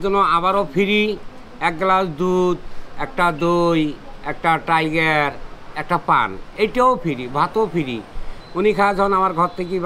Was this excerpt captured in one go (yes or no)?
yes